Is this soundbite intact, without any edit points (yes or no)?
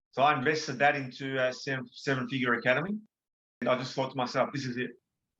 no